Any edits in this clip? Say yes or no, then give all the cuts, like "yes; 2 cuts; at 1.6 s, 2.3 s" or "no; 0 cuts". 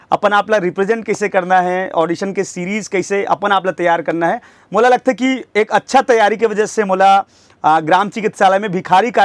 no; 0 cuts